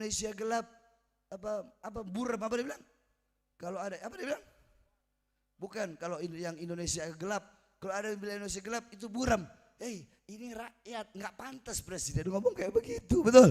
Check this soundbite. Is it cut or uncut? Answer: uncut